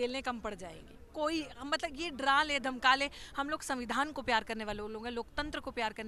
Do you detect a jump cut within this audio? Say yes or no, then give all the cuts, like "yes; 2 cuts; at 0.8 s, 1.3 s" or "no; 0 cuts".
no; 0 cuts